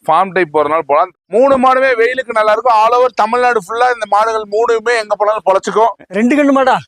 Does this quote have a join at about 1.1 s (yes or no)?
yes